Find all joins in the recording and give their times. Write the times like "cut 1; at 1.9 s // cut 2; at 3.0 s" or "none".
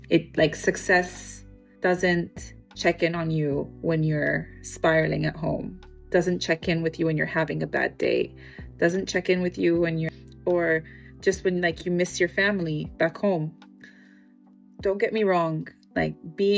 none